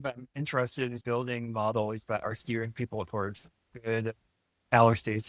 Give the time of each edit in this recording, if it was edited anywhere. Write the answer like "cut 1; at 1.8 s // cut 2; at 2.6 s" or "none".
cut 1; at 1.0 s